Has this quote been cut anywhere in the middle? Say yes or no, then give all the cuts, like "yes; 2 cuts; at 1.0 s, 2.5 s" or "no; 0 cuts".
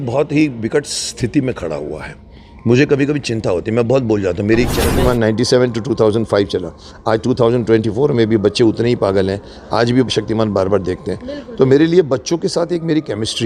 yes; 1 cut; at 4.8 s